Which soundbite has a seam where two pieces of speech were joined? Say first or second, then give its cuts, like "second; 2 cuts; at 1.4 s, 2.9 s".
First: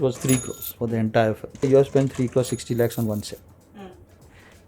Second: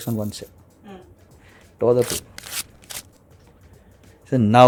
first; 1 cut; at 1.6 s